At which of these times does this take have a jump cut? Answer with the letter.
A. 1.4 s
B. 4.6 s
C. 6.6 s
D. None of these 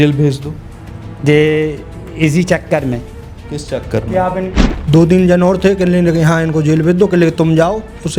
B